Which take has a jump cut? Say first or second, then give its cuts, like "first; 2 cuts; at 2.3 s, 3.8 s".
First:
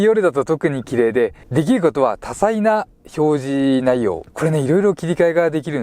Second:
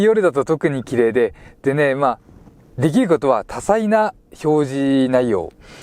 first; 2 cuts; at 1.4 s, 4.3 s